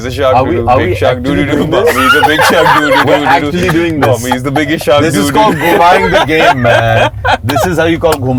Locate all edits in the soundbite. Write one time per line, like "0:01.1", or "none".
none